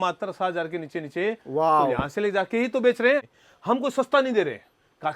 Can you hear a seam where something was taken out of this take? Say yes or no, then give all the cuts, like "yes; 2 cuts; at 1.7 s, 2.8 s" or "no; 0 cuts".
yes; 1 cut; at 3.3 s